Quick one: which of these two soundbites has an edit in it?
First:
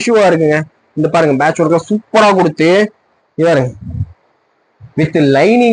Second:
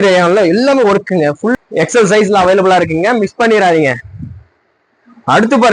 second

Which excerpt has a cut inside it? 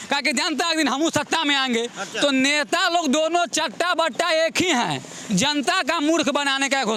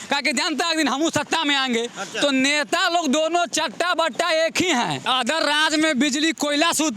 second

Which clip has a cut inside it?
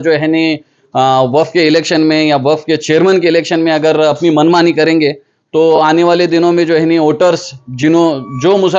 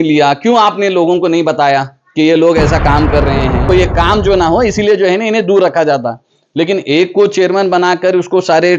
second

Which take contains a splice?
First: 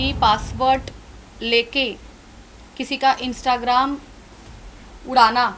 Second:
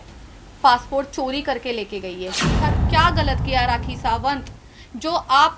second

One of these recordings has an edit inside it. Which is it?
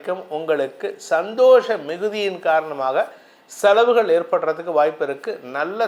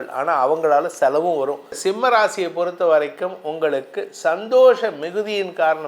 second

